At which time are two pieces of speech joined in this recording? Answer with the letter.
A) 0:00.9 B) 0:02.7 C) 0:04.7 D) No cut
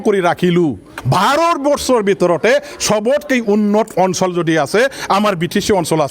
A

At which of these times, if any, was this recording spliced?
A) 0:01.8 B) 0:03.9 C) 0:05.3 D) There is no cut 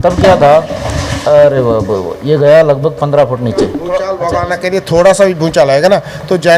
B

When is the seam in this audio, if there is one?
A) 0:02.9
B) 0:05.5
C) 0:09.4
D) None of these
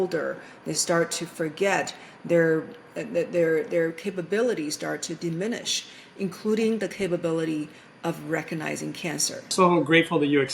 C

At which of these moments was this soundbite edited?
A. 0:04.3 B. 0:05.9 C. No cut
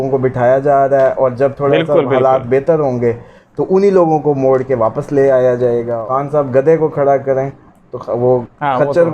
B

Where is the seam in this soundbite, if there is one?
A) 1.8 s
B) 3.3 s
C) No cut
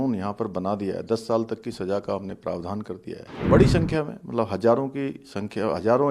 B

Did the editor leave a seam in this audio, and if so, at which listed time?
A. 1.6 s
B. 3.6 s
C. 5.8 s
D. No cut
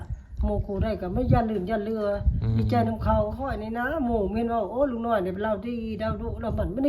B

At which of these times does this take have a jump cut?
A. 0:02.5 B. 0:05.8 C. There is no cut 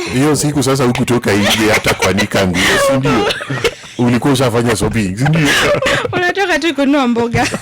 B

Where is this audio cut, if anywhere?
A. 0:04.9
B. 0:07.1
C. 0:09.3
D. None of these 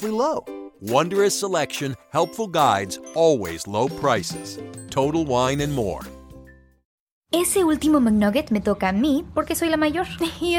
B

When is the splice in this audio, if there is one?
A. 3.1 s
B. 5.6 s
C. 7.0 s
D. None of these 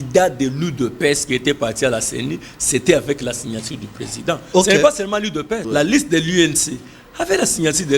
B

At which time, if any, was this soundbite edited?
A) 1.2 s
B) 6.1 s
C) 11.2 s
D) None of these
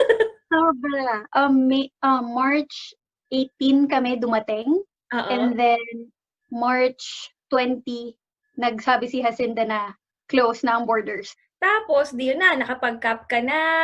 C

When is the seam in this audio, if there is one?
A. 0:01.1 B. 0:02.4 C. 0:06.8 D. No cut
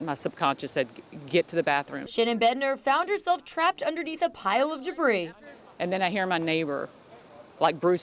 B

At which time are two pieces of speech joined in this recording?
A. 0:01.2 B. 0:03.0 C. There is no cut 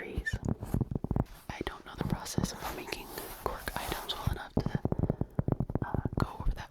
A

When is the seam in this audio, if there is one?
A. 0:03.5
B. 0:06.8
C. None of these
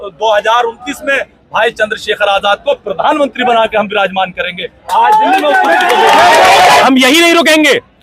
B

